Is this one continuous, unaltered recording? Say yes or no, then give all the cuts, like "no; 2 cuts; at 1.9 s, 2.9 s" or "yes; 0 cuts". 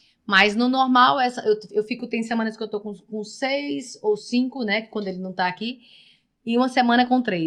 yes; 0 cuts